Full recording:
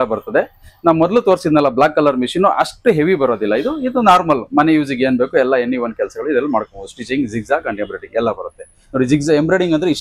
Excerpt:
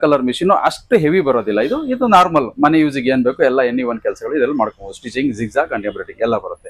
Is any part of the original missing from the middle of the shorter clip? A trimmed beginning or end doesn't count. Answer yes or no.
no